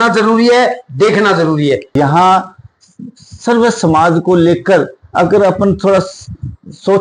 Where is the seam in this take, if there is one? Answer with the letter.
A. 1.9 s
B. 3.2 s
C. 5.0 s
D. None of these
A